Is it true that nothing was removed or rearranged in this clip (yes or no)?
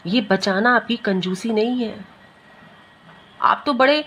yes